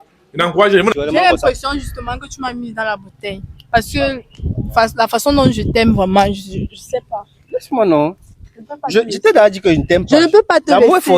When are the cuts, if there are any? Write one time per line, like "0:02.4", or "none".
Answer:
0:00.9